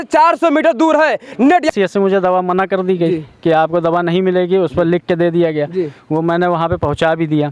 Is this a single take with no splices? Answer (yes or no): no